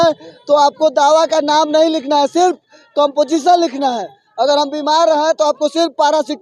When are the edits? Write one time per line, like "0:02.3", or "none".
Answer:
none

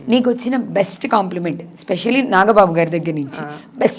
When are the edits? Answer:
none

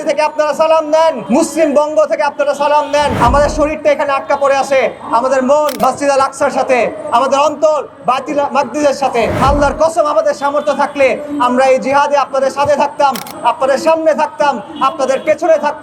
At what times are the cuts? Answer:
0:01.2
0:03.2
0:05.8
0:09.4

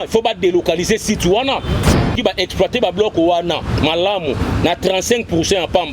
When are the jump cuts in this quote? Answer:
0:01.9

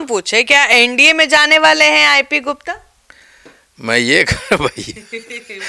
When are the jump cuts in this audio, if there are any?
none

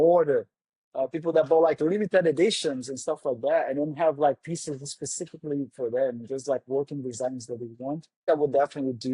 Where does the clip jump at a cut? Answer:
0:08.2

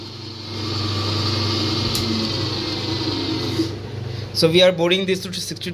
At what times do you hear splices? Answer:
none

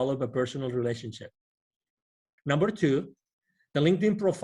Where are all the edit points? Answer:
0:02.3

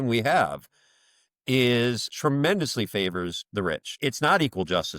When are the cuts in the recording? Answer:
none

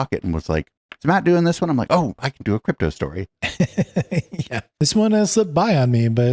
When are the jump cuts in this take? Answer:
none

